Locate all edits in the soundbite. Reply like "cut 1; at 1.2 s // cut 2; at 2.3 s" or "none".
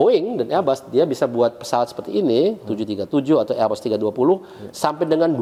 none